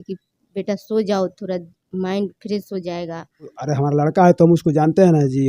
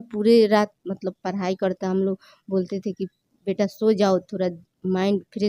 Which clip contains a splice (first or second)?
first